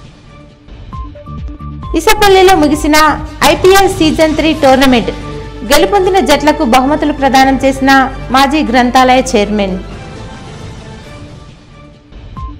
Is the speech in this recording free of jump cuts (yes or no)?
no